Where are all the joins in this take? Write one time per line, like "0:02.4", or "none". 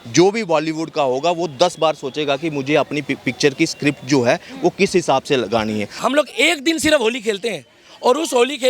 0:05.9